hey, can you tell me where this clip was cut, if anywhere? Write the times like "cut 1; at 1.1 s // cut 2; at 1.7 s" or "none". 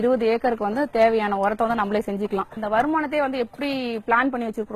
cut 1; at 2.5 s